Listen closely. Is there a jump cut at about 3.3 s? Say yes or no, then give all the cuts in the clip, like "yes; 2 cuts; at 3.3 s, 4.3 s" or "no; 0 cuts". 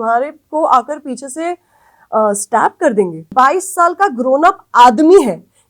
yes; 1 cut; at 3.3 s